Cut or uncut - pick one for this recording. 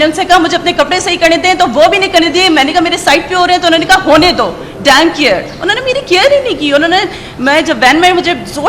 uncut